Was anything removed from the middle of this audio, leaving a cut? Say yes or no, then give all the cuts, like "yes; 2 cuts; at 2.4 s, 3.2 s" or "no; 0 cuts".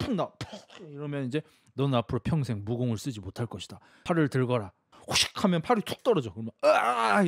yes; 2 cuts; at 3.9 s, 4.9 s